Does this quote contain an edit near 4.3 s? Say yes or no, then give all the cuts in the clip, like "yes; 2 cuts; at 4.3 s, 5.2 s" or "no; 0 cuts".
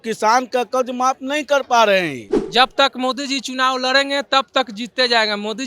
no; 1 cut; at 2.3 s